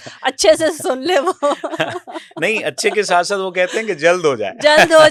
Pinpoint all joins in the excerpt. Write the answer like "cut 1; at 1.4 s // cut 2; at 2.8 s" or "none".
none